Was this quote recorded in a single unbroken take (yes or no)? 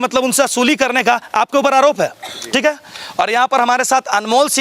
yes